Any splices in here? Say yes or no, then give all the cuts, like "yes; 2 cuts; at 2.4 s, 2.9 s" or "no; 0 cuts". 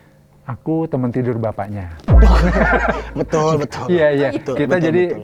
no; 0 cuts